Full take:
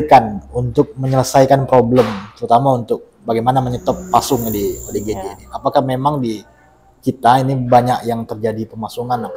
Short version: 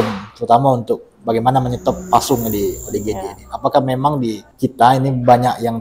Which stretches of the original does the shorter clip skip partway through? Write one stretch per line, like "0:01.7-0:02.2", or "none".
0:06.5-0:06.9